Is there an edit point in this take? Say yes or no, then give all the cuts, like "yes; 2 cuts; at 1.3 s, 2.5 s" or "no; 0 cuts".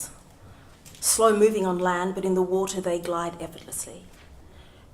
no; 0 cuts